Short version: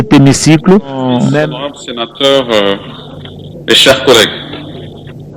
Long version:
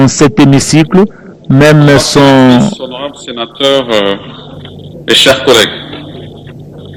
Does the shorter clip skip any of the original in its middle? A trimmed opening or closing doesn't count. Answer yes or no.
yes